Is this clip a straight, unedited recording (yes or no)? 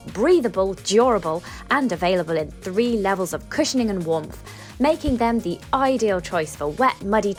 yes